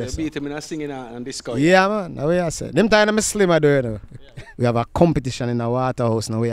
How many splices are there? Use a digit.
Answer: 1